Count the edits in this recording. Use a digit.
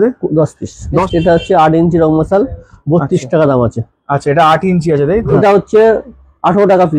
2